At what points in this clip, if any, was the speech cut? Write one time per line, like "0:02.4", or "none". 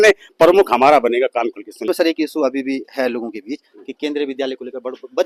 0:01.9